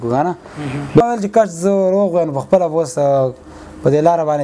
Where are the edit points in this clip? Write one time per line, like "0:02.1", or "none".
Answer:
0:00.9